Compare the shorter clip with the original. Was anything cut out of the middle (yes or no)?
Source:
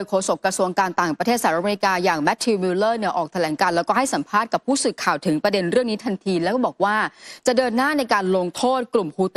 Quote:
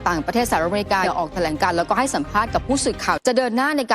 yes